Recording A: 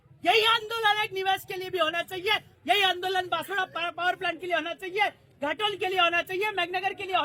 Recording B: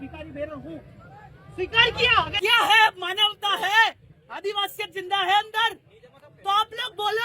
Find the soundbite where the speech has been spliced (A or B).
B